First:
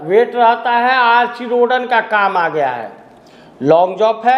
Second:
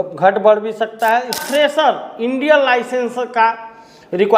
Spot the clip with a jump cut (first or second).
second